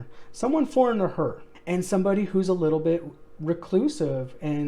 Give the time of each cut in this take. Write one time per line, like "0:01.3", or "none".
none